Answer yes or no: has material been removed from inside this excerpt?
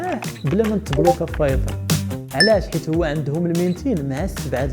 yes